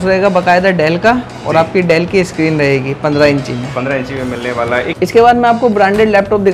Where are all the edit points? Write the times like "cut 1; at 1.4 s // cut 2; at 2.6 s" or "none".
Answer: cut 1; at 4.9 s